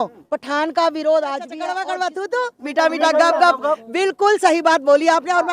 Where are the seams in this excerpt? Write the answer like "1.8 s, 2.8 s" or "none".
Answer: 1.7 s